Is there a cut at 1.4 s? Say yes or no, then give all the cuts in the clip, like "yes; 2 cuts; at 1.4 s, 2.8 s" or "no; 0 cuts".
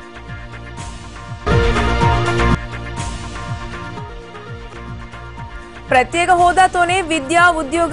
no; 0 cuts